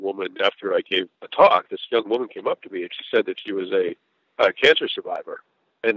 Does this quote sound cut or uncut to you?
cut